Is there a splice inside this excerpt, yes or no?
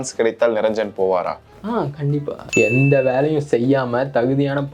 yes